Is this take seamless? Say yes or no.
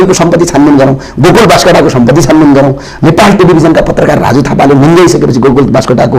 yes